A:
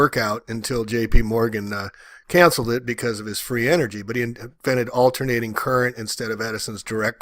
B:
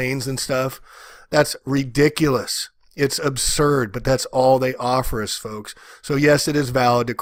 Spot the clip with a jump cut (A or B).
A